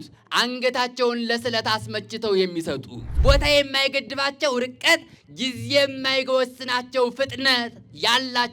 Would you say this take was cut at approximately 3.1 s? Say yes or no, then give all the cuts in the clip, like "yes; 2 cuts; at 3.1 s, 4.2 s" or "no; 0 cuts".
yes; 1 cut; at 3.1 s